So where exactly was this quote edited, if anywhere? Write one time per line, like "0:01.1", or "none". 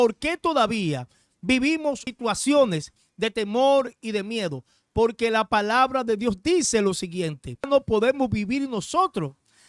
0:02.1
0:07.7